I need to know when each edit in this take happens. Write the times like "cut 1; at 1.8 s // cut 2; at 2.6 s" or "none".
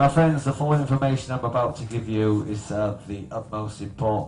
cut 1; at 1.8 s

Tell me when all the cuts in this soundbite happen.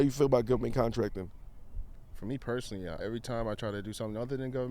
cut 1; at 3.0 s

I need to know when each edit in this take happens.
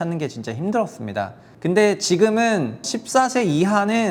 cut 1; at 1.4 s // cut 2; at 2.9 s

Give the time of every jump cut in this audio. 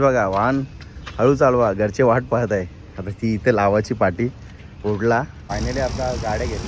cut 1; at 5.4 s

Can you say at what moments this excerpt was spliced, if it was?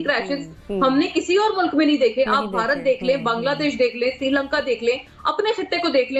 none

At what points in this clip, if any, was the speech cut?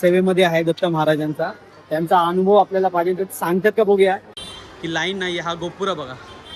cut 1; at 4.4 s

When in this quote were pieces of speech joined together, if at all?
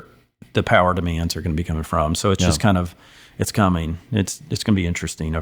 none

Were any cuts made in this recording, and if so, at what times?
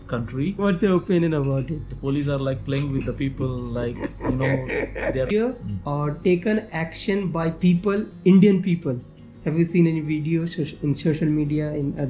cut 1; at 5.3 s

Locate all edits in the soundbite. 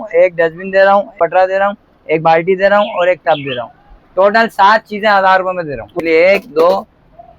cut 1; at 1.1 s // cut 2; at 5.9 s

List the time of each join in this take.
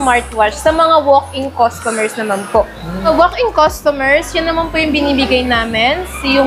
cut 1; at 3.0 s

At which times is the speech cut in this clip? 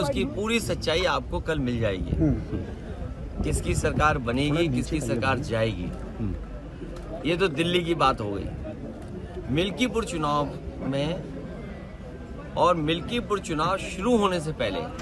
none

